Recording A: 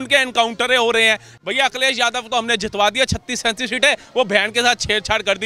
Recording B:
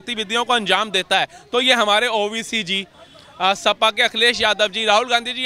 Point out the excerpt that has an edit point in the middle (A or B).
A